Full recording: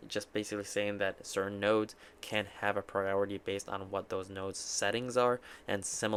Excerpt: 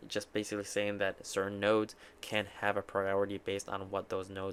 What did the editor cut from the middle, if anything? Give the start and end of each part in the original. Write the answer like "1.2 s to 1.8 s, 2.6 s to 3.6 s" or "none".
none